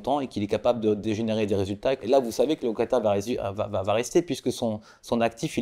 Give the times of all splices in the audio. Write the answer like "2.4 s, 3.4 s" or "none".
2.0 s